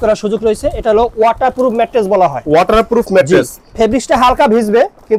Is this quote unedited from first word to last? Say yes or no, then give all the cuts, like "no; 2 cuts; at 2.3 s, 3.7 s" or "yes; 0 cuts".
yes; 0 cuts